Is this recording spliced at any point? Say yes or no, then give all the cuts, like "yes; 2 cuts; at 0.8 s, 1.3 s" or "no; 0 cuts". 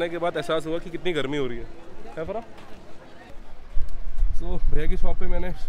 yes; 1 cut; at 3.3 s